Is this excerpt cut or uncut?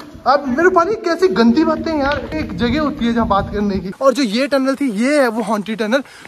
cut